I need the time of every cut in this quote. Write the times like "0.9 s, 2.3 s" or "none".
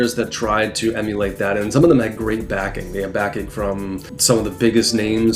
4.1 s